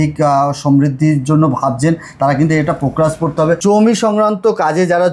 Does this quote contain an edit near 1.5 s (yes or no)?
no